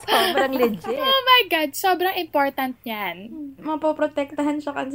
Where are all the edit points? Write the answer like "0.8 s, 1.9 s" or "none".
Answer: 3.6 s